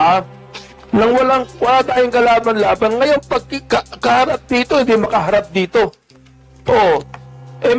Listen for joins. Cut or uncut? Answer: uncut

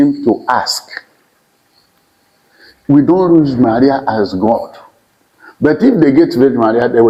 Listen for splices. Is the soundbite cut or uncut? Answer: uncut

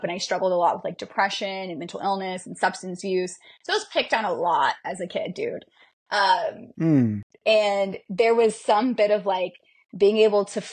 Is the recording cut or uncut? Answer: uncut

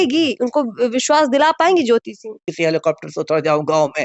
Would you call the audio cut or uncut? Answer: cut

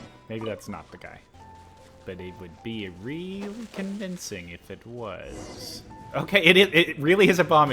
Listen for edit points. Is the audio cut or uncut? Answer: cut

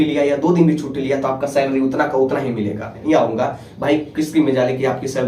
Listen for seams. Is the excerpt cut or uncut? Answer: cut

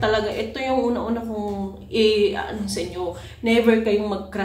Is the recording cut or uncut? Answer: uncut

